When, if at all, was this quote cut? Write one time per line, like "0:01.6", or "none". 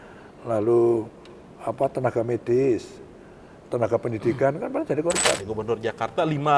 0:05.5